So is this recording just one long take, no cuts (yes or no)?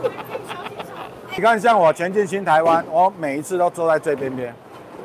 no